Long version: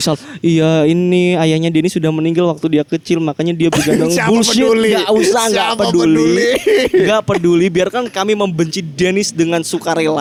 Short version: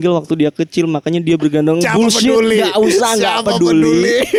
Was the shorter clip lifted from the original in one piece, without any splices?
yes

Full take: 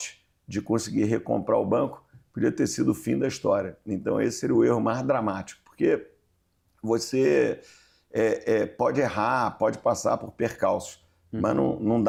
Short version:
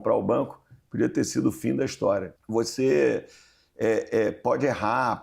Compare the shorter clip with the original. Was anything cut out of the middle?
yes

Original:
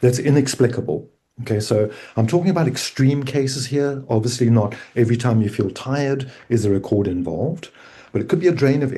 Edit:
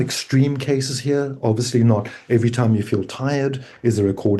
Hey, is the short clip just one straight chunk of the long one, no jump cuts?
yes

